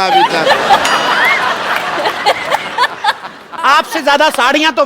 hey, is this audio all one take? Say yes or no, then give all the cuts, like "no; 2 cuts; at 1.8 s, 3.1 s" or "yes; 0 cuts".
no; 1 cut; at 3.5 s